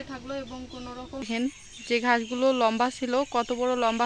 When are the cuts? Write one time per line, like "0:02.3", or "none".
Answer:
0:01.2